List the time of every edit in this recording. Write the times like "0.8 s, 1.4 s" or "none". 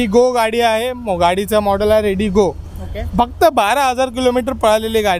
none